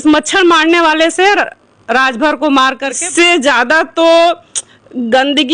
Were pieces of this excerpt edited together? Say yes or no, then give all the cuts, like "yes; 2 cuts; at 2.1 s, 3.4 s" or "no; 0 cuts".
yes; 1 cut; at 3.0 s